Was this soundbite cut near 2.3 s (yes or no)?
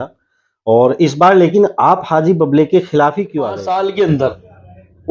no